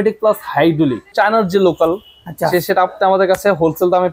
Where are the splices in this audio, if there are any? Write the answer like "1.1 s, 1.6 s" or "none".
1.1 s